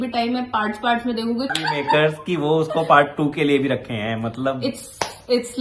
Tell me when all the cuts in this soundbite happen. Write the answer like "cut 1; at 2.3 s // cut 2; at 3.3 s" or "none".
cut 1; at 1.5 s